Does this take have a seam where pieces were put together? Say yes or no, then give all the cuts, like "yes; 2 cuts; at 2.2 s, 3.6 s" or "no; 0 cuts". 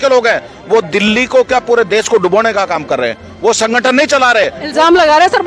no; 0 cuts